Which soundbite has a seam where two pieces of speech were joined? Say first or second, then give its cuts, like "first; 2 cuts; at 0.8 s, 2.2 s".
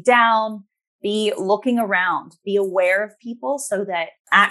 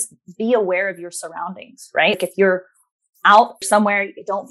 second; 2 cuts; at 2.1 s, 3.6 s